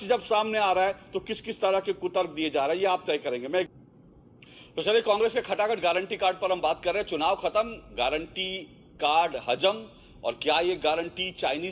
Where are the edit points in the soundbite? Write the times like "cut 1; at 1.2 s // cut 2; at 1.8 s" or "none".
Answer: cut 1; at 3.7 s